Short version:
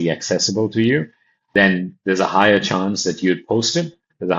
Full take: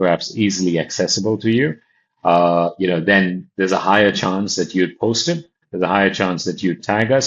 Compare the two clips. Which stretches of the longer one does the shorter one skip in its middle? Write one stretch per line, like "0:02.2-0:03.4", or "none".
0:02.2-0:03.0

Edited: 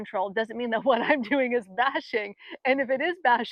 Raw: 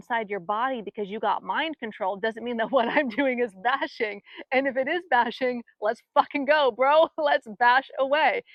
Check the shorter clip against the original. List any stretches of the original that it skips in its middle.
none

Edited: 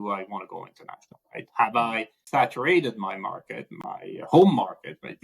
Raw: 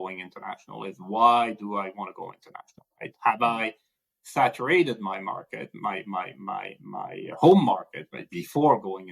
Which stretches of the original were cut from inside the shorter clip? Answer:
0:03.8-0:04.2
0:05.7-0:06.7

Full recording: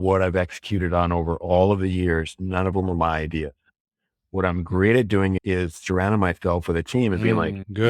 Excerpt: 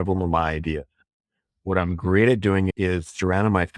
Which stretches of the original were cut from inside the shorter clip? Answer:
none

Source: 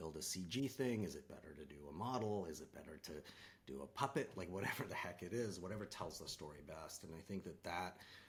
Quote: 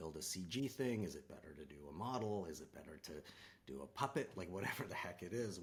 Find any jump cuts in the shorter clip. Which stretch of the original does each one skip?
none

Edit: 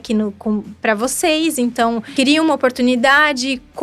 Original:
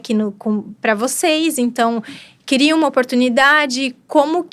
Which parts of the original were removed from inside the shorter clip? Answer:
0:02.0-0:02.4

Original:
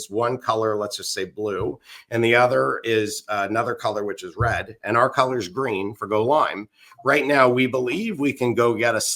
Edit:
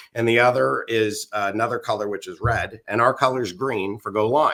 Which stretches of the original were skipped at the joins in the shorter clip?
none

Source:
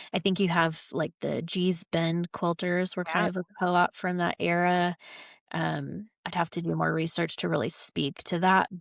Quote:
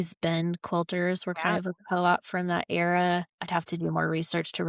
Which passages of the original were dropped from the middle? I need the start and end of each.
0:05.1-0:06.2

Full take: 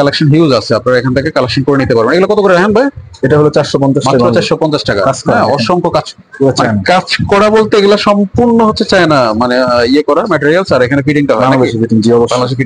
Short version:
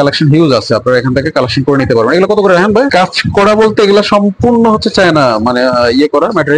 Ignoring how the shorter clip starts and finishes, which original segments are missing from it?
0:02.9-0:06.8

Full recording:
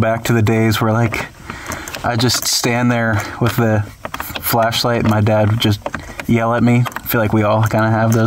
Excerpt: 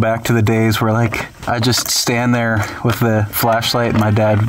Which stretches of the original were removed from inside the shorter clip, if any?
0:01.3-0:01.9
0:03.9-0:04.4

